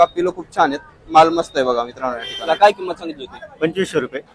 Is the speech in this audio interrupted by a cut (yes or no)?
yes